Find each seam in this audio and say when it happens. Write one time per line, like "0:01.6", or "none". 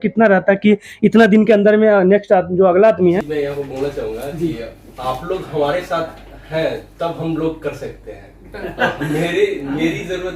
0:03.2